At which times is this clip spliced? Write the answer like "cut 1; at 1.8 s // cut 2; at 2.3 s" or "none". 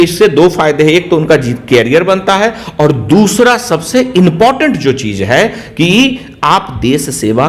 none

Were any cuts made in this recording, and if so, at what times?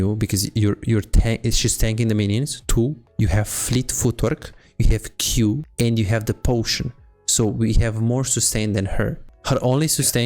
cut 1; at 5.7 s

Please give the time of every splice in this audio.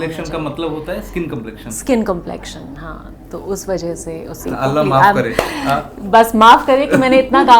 cut 1; at 4.5 s

